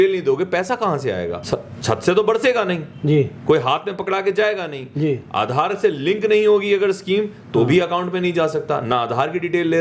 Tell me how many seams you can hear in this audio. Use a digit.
1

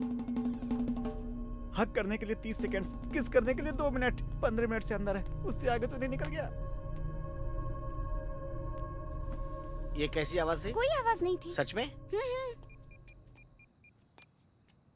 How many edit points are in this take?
1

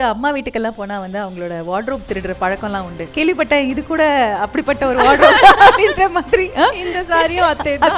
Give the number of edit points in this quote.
1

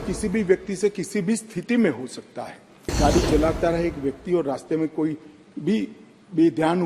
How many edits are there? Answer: 1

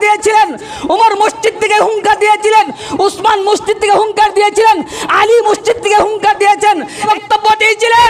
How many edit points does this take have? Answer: 1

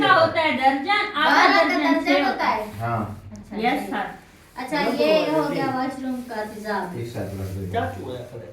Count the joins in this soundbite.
1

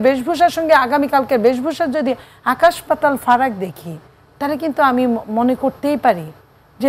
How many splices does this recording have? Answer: 0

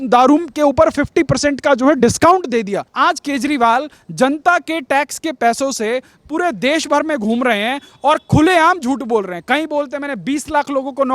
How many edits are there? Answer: 1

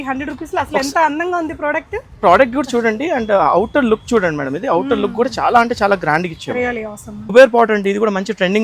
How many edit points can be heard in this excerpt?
1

